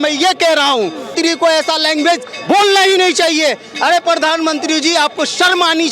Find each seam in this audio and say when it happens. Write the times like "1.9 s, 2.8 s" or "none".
1.1 s

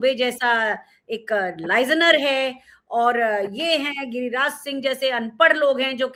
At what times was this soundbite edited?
none

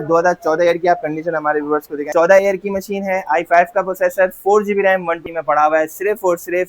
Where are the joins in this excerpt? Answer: 2.1 s, 5.2 s

